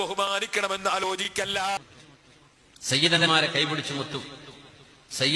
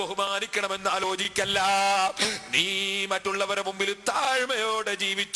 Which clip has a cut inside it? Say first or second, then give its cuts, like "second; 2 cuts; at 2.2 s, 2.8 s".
first; 1 cut; at 1.9 s